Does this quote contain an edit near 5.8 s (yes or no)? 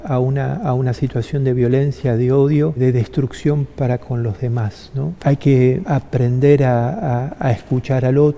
yes